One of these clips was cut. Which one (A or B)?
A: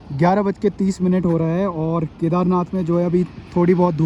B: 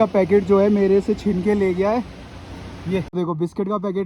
B